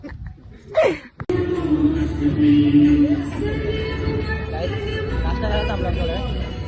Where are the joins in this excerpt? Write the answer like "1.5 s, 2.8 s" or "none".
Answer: none